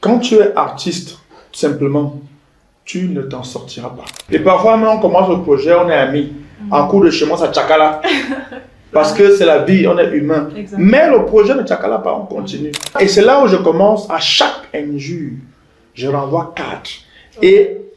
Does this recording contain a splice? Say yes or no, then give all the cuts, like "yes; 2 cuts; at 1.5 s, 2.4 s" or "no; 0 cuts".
yes; 2 cuts; at 4.2 s, 13.0 s